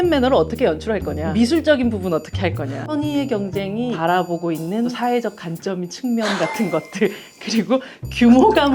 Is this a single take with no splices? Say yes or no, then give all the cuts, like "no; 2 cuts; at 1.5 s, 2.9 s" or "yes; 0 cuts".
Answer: no; 4 cuts; at 1.2 s, 2.8 s, 4.0 s, 4.9 s